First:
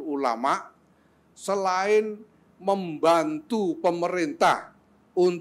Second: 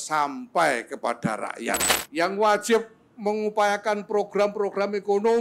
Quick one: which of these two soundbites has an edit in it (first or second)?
second